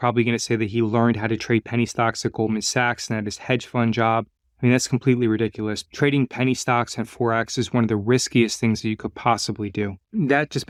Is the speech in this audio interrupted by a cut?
no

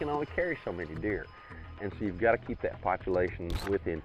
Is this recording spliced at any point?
no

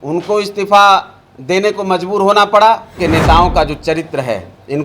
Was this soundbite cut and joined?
yes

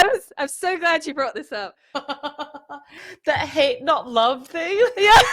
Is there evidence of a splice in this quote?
yes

